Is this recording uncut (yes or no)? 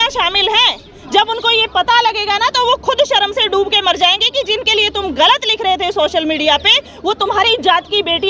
yes